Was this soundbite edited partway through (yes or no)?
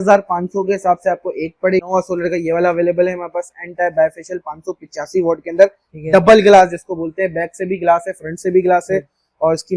yes